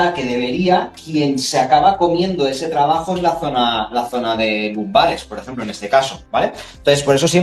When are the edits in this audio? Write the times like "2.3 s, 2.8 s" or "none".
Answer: none